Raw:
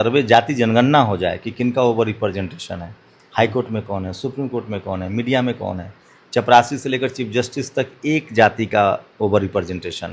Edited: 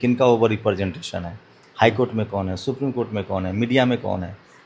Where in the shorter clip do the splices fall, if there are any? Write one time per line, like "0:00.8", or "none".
none